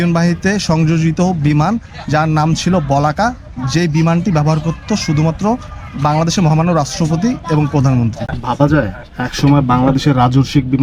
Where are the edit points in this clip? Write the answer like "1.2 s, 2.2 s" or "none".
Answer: 8.3 s